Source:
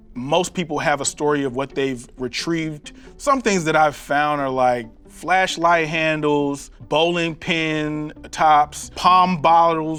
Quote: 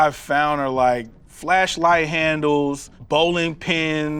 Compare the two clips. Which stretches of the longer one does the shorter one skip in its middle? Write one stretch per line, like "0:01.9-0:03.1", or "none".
none